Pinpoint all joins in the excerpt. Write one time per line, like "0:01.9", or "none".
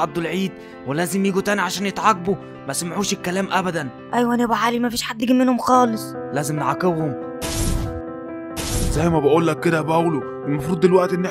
none